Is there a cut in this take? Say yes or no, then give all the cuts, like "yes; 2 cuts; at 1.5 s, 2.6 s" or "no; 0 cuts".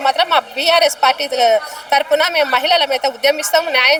no; 0 cuts